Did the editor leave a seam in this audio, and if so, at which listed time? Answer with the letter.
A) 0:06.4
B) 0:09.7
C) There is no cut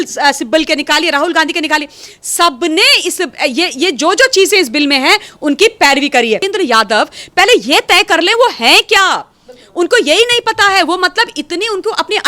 A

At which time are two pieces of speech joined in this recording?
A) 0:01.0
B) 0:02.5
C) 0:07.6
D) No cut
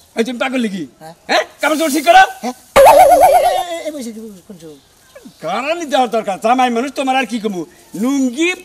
D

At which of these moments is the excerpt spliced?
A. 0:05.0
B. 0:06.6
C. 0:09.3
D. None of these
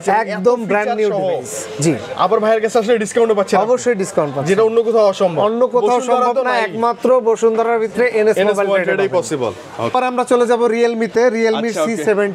D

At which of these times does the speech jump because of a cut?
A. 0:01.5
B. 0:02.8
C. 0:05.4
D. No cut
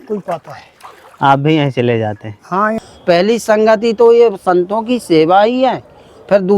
B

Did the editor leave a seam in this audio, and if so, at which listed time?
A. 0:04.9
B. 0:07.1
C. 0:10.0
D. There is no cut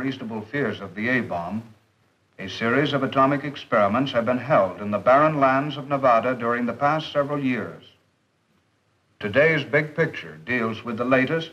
A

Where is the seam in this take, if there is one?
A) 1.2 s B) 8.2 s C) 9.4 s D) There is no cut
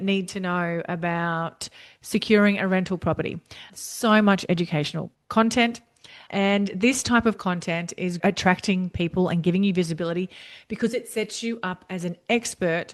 B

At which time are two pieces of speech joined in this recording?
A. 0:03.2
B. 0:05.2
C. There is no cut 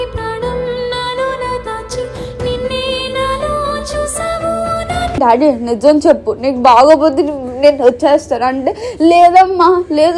B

